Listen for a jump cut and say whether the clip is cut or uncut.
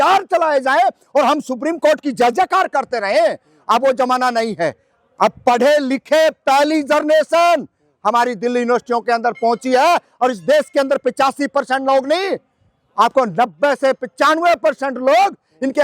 uncut